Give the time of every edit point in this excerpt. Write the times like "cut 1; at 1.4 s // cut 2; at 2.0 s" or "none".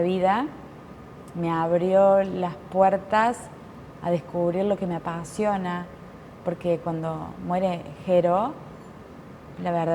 none